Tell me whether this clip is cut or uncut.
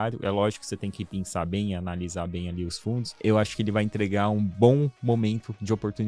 cut